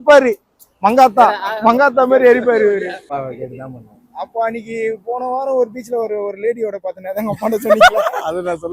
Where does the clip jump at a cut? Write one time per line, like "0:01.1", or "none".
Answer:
0:03.1